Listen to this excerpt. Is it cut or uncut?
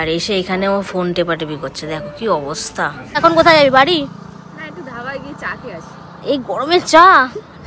cut